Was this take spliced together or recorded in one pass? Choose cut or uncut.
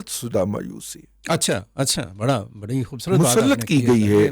uncut